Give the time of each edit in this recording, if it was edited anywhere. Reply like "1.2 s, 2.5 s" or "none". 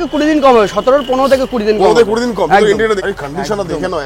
3.0 s

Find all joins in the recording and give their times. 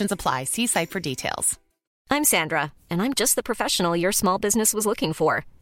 1.9 s

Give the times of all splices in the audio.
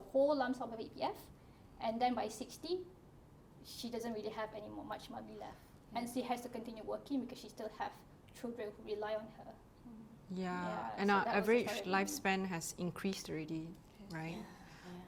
none

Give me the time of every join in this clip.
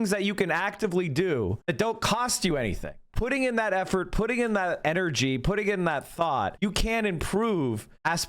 1.6 s, 3.0 s, 4.8 s, 6.5 s

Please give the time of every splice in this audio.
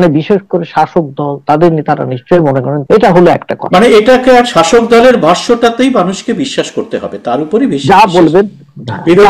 2.7 s

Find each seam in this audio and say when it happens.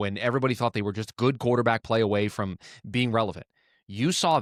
none

